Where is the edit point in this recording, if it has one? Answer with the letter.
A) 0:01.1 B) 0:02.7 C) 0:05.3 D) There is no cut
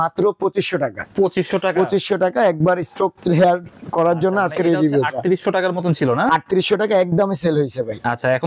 D